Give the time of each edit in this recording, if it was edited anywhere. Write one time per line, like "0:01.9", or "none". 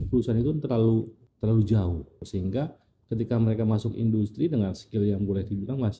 0:01.2
0:02.3